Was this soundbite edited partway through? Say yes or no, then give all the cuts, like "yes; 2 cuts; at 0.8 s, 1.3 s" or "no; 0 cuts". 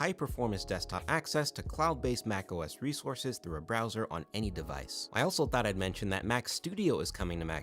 no; 0 cuts